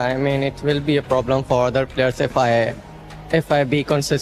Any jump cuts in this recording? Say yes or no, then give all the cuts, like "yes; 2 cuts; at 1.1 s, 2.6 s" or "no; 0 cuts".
no; 0 cuts